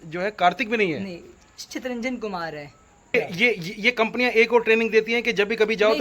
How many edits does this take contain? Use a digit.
1